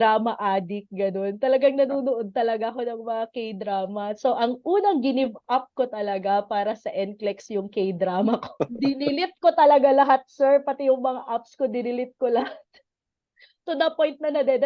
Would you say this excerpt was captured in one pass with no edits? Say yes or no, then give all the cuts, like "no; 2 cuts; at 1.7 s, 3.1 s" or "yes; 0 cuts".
yes; 0 cuts